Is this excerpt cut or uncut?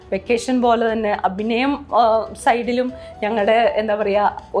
uncut